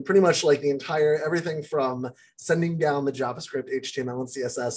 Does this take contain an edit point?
no; 0 cuts

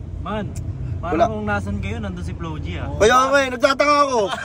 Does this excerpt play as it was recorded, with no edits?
yes; 0 cuts

